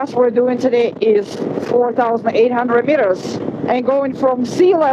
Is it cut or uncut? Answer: uncut